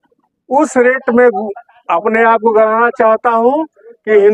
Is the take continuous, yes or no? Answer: yes